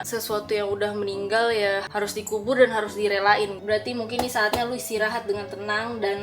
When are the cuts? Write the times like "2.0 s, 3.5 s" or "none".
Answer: 1.9 s, 3.6 s